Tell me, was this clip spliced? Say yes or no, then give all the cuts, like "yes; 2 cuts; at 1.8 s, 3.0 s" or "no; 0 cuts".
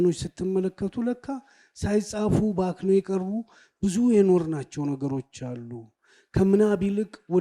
no; 0 cuts